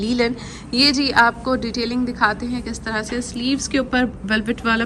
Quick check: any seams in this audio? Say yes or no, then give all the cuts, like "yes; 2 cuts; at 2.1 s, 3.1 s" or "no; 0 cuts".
no; 0 cuts